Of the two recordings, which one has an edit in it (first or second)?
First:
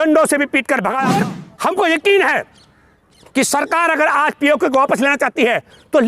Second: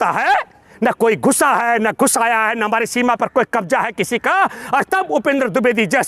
first